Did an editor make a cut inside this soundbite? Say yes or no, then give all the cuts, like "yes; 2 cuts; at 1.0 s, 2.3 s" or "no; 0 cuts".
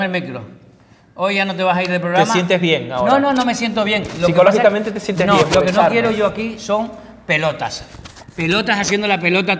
no; 0 cuts